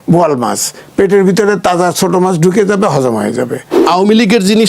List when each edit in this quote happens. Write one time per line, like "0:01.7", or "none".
0:03.7